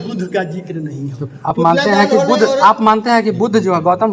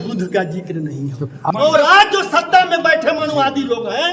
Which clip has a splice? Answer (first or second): second